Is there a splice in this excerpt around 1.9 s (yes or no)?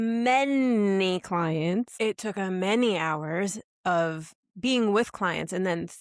yes